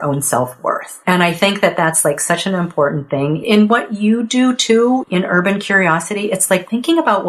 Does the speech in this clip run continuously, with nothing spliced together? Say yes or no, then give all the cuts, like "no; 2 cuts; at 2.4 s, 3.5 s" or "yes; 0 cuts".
yes; 0 cuts